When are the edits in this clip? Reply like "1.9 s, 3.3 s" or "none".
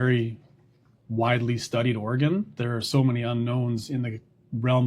2.6 s